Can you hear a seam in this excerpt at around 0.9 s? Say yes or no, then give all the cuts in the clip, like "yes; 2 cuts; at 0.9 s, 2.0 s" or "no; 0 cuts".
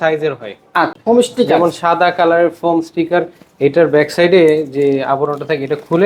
yes; 1 cut; at 0.9 s